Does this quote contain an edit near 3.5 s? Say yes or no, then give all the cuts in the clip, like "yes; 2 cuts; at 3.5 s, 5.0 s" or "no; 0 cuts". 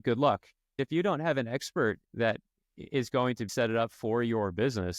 yes; 3 cuts; at 0.8 s, 2.1 s, 3.5 s